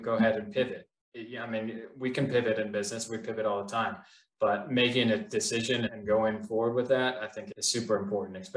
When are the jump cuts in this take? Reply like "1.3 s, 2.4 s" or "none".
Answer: 5.9 s, 7.4 s